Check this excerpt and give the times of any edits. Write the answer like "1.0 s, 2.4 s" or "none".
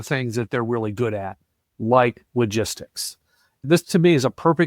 3.6 s